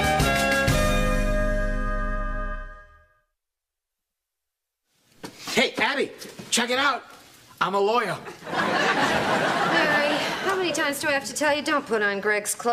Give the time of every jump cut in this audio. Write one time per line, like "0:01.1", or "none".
none

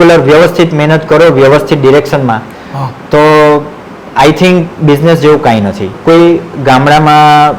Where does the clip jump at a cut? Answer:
0:05.9

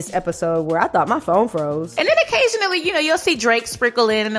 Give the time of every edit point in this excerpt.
0:01.9

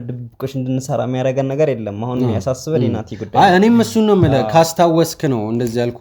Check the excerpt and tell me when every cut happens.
none

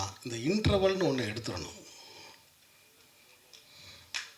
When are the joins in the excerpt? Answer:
none

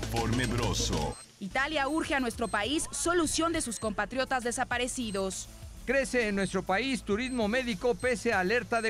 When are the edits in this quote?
0:01.1
0:05.7

